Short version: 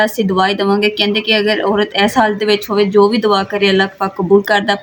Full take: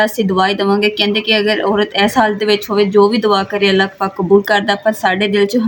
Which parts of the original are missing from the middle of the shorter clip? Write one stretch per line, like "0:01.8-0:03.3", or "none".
none

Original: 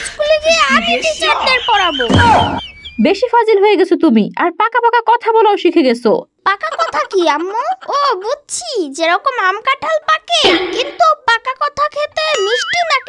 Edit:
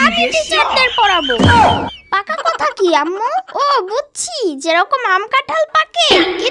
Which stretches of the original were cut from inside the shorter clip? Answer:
0:02.8-0:06.4

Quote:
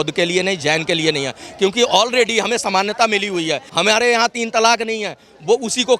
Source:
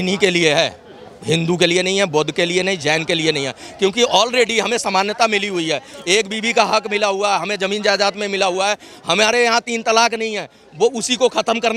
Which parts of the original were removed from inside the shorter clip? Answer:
0:05.9-0:09.0

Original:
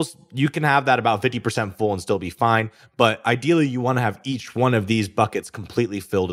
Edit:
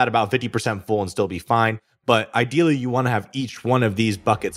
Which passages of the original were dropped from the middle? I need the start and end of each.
none

